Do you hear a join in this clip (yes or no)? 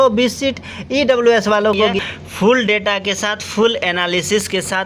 yes